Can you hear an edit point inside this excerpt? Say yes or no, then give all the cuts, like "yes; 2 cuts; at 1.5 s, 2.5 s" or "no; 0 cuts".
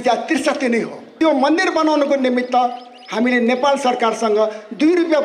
yes; 1 cut; at 1.1 s